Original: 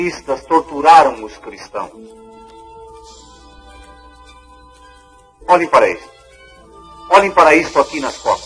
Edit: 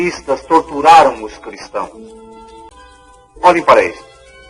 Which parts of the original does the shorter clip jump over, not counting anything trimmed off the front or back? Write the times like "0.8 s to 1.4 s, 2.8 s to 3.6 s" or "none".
2.6 s to 4.7 s